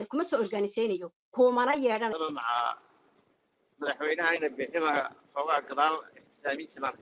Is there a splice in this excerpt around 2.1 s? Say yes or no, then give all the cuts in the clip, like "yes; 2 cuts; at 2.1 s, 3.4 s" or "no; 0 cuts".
yes; 1 cut; at 2.1 s